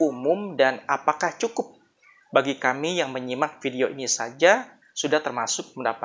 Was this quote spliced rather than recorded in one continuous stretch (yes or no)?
no